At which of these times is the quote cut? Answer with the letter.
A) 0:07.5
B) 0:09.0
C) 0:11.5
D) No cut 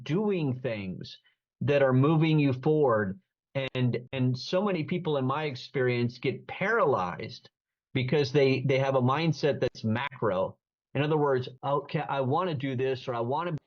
C